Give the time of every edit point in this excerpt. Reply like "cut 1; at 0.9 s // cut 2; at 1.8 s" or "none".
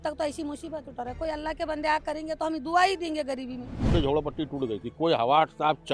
cut 1; at 3.9 s